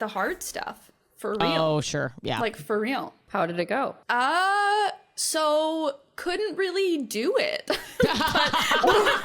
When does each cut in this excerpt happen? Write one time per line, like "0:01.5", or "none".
0:03.2
0:04.0